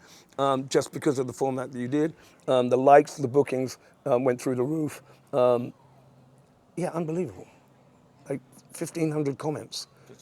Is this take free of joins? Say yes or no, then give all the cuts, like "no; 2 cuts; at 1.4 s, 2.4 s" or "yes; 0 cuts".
yes; 0 cuts